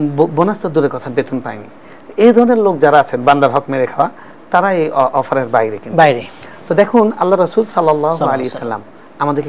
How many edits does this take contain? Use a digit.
0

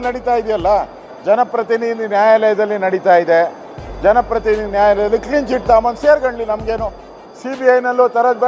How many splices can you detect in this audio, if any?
0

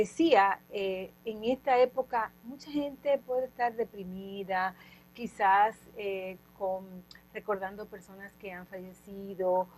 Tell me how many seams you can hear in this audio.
0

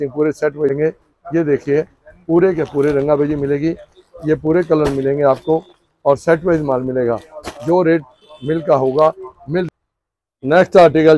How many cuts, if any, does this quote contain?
2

